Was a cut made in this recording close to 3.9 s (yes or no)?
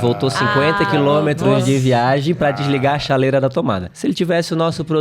yes